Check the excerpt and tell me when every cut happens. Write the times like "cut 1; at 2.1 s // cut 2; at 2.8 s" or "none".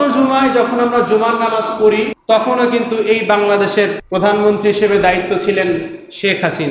cut 1; at 2.2 s // cut 2; at 4.0 s